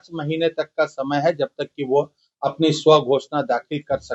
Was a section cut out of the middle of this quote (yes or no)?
no